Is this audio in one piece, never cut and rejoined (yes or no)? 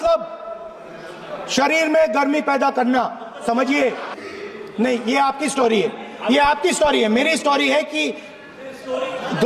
no